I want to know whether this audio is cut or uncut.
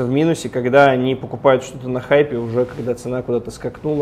uncut